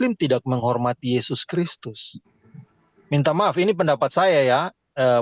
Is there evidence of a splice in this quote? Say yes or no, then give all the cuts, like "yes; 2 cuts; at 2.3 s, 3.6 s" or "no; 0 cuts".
no; 0 cuts